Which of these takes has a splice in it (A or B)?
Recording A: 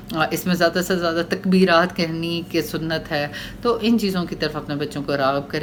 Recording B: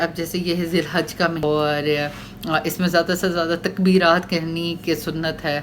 B